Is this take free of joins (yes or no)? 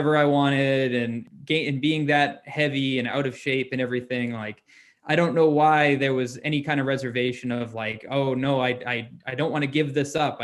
no